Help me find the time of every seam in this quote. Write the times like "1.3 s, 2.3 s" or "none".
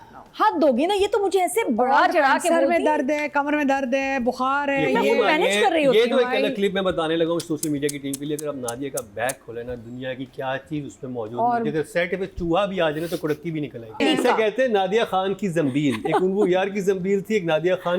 14.0 s